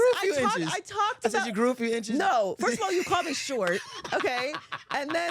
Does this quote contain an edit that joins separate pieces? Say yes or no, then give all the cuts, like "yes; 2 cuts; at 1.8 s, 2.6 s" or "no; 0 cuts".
no; 0 cuts